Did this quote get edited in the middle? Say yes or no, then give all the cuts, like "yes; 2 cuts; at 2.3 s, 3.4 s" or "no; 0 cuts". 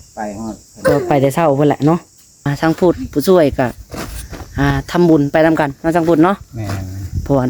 yes; 1 cut; at 2.5 s